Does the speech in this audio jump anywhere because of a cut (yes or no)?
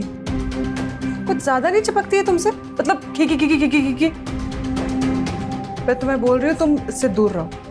no